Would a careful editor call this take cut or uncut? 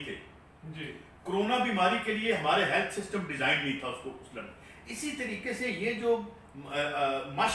uncut